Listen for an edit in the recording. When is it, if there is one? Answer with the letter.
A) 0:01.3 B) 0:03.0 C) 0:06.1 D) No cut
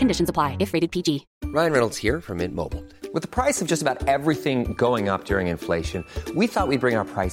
A